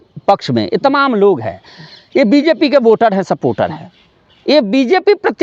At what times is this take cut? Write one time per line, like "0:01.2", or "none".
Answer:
none